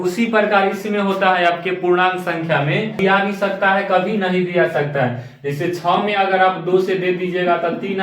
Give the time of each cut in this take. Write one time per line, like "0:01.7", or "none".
0:03.0